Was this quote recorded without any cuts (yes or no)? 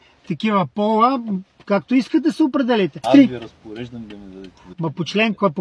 no